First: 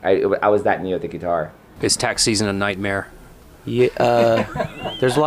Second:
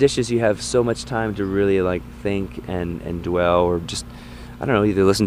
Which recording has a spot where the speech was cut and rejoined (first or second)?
first